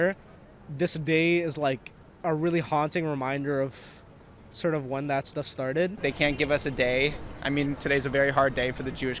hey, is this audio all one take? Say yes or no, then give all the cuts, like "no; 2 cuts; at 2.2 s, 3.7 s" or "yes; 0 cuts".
no; 1 cut; at 6.0 s